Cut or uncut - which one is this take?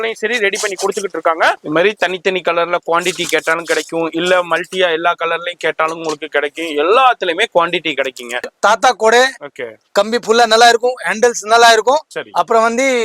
cut